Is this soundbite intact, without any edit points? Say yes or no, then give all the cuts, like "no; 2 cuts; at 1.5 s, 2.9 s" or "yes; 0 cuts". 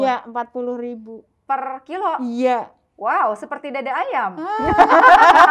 yes; 0 cuts